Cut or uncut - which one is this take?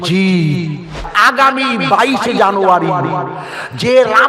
cut